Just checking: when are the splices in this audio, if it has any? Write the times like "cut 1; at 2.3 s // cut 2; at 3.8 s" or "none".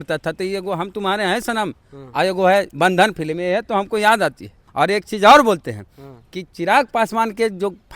cut 1; at 4.6 s